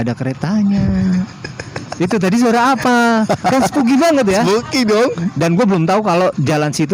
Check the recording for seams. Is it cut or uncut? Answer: cut